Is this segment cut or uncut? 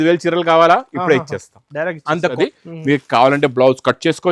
cut